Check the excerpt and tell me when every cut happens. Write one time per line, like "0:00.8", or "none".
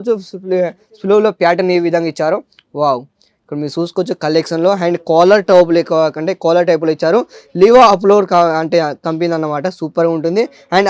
none